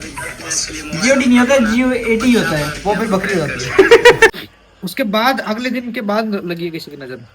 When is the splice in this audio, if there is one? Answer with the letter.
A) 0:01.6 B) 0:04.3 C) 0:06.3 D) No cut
B